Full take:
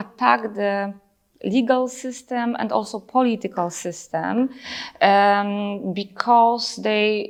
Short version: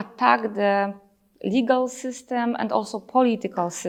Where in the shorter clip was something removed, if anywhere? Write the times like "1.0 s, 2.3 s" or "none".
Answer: none